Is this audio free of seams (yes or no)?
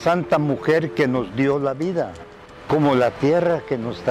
yes